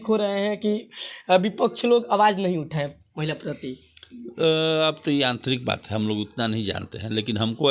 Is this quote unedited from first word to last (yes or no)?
yes